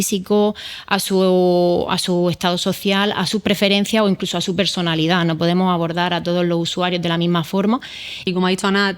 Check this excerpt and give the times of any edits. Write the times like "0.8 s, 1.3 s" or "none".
8.1 s